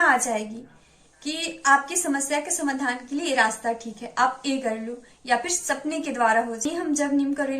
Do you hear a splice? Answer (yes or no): yes